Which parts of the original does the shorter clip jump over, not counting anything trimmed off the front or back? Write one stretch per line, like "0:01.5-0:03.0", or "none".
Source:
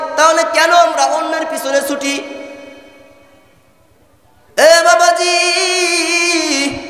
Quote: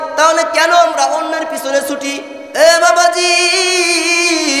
0:02.4-0:04.4

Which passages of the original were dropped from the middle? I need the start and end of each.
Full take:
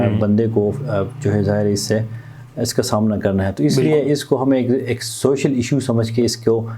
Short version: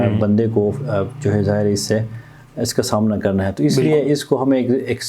none

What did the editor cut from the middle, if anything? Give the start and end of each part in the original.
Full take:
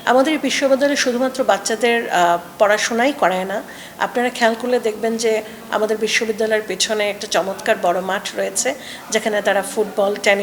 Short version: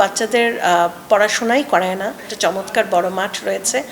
0:03.8-0:07.2

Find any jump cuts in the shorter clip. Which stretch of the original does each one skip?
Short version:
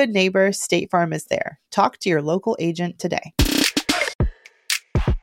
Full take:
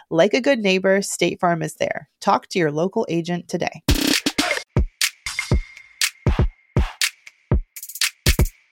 0:04.7-0:05.5

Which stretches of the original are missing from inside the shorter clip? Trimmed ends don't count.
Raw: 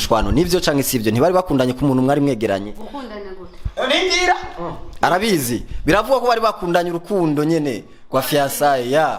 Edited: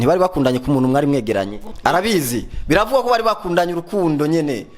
0:02.8-0:04.8

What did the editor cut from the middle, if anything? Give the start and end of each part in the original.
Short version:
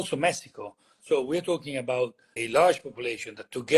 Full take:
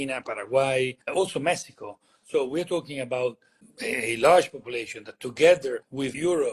0:03.5-0:04.0

